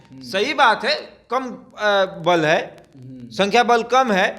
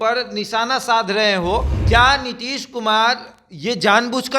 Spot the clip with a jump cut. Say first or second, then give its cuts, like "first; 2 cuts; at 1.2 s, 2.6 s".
second; 1 cut; at 1.7 s